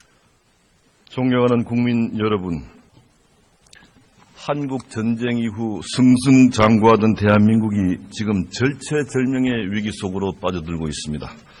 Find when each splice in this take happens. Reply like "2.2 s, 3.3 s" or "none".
2.8 s

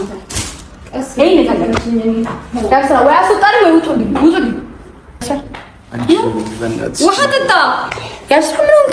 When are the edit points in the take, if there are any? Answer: 5.3 s

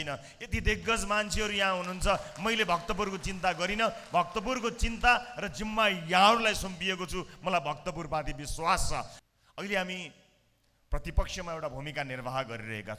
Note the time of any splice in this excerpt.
9.1 s

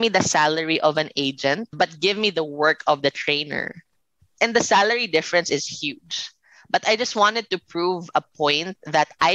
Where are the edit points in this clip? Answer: 1.7 s, 4.3 s

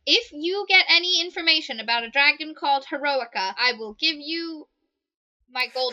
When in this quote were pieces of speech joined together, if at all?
3.6 s

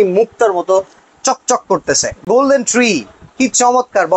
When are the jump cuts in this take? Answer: 2.3 s

